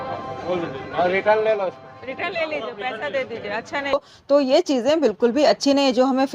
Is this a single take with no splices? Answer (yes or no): no